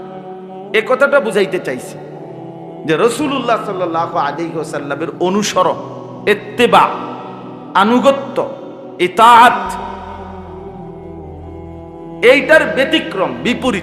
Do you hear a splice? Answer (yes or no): yes